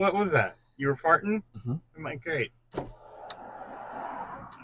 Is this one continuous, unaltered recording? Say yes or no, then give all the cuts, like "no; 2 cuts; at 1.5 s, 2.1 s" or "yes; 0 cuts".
yes; 0 cuts